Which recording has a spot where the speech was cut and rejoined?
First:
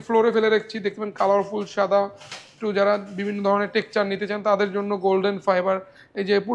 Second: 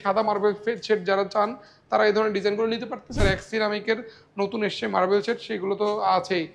second; 1 cut; at 3.2 s

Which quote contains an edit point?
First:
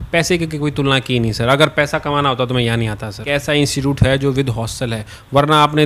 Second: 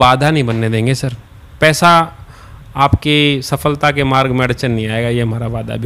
first; 1 cut; at 3.2 s

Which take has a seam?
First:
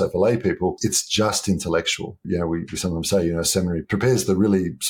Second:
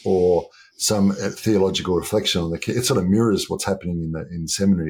first; 3 cuts; at 0.8 s, 2.2 s, 3.8 s

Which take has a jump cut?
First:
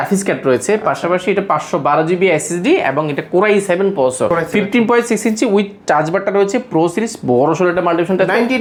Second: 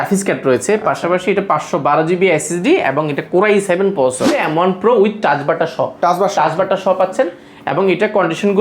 second; 1 cut; at 4.3 s

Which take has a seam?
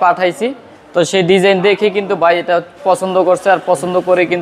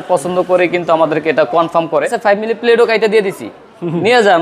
second; 1 cut; at 2.2 s

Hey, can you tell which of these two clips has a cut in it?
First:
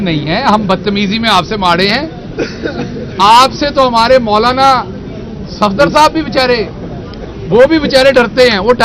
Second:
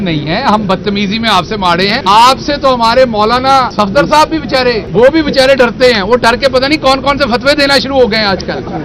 second; 3 cuts; at 2.0 s, 3.7 s, 4.8 s

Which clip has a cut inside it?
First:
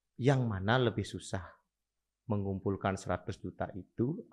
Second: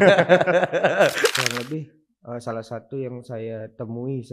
second; 1 cut; at 1.3 s

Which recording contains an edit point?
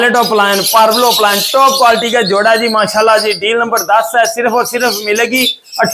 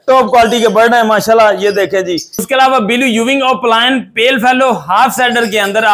second; 1 cut; at 2.4 s

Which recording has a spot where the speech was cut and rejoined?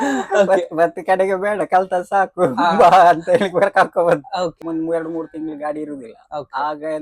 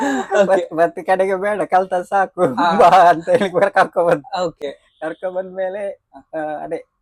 first; 1 cut; at 4.6 s

